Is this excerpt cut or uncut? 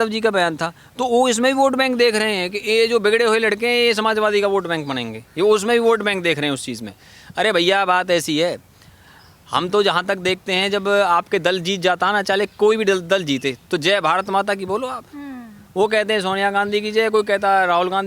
uncut